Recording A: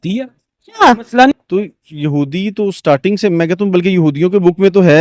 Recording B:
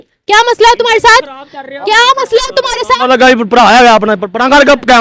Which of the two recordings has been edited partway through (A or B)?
A